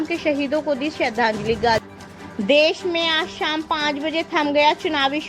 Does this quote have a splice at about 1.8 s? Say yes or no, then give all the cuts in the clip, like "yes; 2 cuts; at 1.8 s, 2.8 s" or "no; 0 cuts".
yes; 1 cut; at 1.8 s